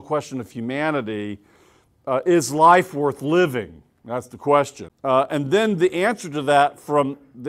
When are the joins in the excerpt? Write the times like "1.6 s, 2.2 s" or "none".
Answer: 4.9 s